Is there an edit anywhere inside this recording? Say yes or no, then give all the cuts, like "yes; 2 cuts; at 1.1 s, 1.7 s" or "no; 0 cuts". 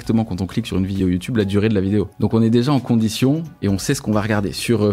yes; 2 cuts; at 1.0 s, 2.1 s